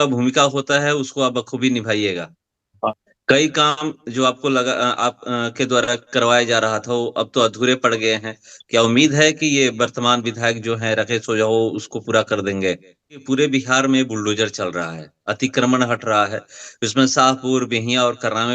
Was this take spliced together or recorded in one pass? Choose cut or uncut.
cut